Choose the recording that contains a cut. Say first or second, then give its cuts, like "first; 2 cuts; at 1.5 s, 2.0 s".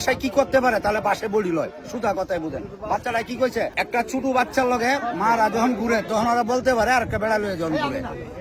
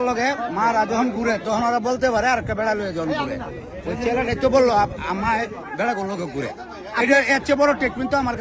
first; 1 cut; at 3.7 s